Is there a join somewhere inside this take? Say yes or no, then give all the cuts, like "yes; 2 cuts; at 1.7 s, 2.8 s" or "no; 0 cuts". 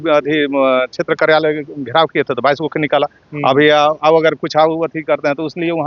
no; 0 cuts